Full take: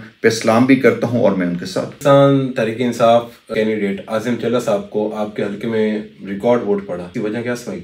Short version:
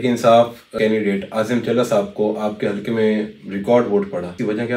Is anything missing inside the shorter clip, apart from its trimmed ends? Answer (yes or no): no